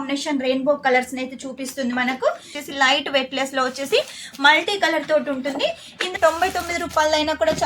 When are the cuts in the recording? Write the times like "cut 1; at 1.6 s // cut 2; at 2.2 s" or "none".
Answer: cut 1; at 2.6 s // cut 2; at 6.1 s